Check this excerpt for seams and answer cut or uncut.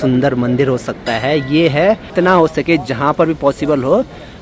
cut